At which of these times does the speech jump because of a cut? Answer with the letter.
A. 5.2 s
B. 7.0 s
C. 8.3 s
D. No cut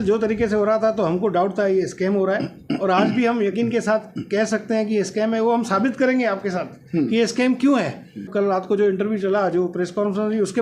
C